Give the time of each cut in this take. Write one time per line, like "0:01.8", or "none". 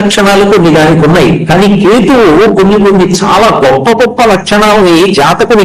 none